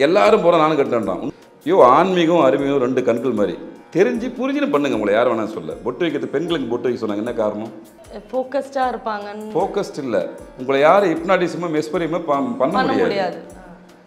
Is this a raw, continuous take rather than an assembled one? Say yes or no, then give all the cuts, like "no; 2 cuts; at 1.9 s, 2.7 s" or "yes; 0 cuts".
no; 1 cut; at 1.2 s